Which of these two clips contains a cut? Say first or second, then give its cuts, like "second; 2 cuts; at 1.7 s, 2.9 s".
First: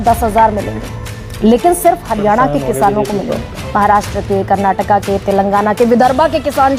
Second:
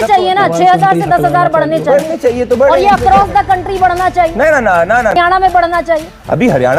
second; 1 cut; at 5.1 s